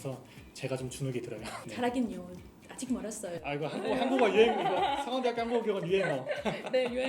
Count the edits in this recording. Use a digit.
1